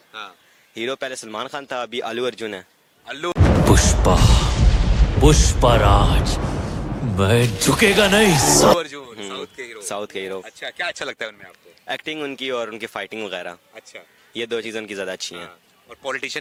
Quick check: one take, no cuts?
yes; 0 cuts

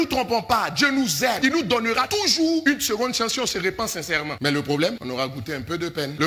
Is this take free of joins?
yes; 0 cuts

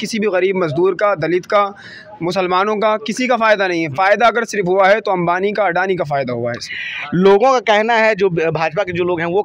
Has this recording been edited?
no; 0 cuts

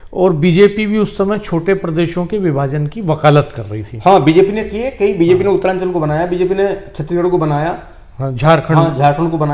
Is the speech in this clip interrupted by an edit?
no; 0 cuts

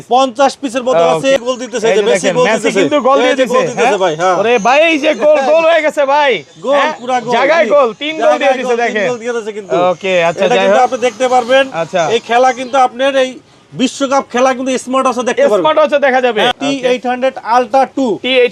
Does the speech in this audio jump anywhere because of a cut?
yes; 2 cuts; at 1.4 s, 16.5 s

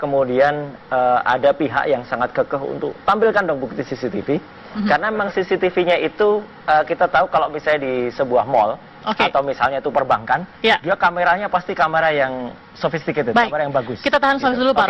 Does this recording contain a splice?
yes; 1 cut; at 10.0 s

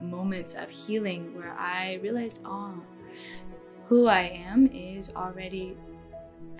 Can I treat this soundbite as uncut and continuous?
yes; 0 cuts

